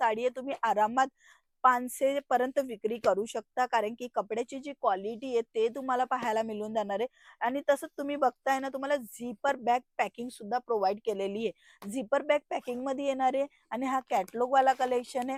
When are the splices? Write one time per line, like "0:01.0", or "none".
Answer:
none